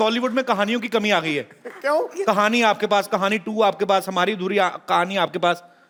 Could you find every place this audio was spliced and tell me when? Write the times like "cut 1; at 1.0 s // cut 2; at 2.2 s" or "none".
none